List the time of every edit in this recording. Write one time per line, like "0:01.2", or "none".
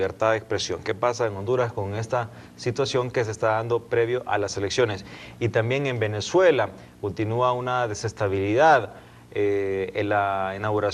0:07.2